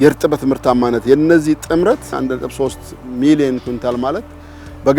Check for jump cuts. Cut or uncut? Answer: cut